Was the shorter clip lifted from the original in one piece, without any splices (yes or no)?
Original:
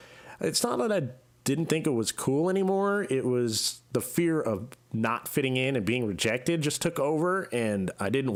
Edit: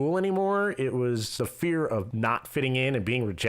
no